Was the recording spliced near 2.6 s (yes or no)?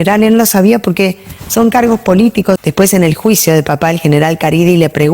yes